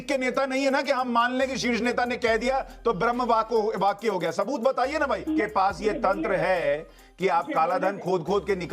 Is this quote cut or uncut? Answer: cut